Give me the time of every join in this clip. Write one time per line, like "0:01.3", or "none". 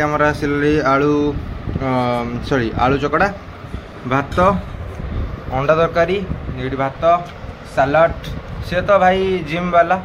none

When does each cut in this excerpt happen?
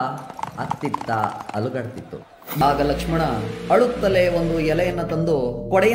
0:02.6

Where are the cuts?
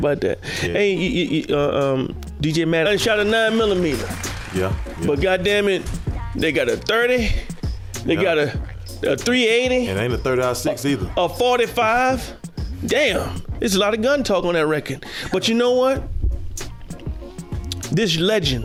none

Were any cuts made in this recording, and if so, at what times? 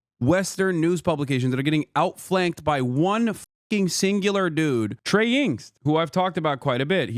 0:05.0

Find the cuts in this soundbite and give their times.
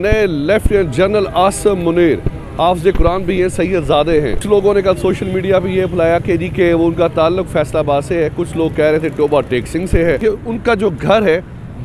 0:04.4
0:10.2

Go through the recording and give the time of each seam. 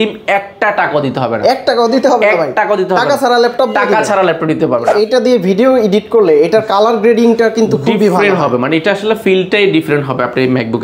0:04.9

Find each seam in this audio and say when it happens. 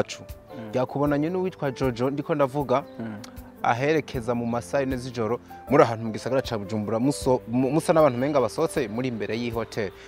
none

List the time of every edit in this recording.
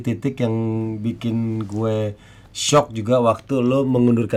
none

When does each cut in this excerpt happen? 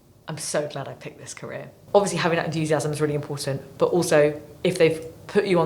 0:01.7

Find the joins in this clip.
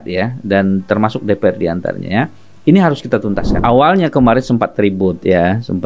0:03.5

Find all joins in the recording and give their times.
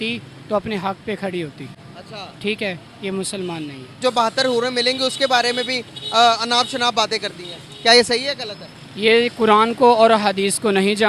0:04.0

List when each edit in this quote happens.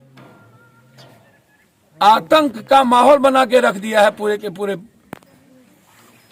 none

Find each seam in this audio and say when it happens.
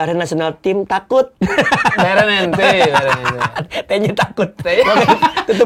none

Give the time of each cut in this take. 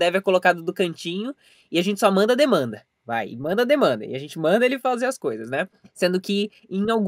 none

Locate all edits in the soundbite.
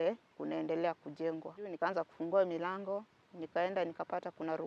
0:01.7

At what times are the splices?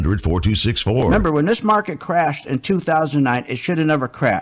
0:01.1

